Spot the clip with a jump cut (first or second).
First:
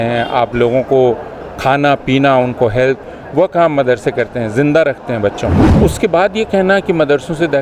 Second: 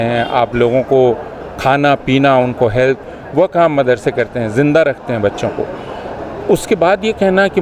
first